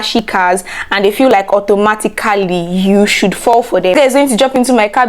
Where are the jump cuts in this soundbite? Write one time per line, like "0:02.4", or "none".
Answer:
0:03.9